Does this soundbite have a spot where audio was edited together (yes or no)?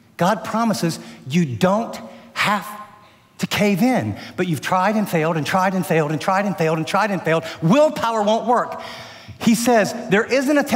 no